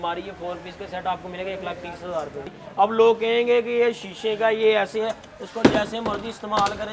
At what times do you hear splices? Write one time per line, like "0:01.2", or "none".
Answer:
0:02.4